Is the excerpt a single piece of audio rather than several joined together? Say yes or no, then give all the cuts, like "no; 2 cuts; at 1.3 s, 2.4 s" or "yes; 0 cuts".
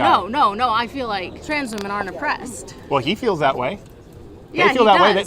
no; 1 cut; at 1.4 s